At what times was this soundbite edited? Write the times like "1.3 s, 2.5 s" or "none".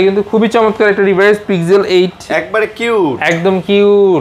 none